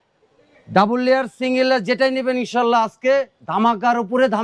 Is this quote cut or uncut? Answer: uncut